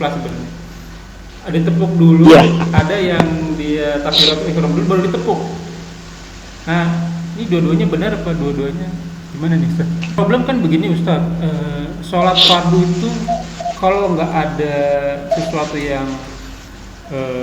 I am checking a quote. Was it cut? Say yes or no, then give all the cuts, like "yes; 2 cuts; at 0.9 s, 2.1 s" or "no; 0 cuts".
yes; 1 cut; at 10.2 s